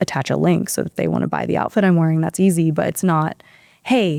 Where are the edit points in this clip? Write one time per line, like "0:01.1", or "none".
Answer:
none